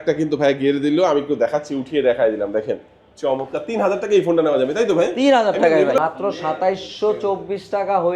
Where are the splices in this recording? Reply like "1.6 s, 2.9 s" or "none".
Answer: 6.0 s